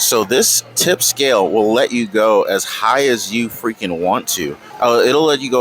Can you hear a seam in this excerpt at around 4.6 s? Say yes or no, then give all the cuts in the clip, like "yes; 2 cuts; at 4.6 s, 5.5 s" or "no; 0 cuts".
yes; 1 cut; at 4.6 s